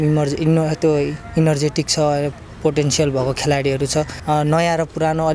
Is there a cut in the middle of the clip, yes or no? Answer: yes